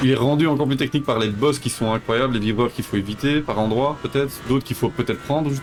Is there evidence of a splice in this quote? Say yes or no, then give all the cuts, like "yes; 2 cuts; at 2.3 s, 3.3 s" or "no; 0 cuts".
no; 0 cuts